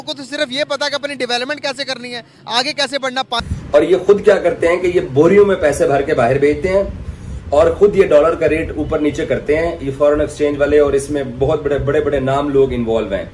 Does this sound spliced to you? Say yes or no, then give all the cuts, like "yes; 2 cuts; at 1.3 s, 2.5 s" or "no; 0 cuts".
yes; 1 cut; at 3.4 s